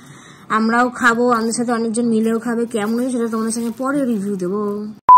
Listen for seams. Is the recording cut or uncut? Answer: uncut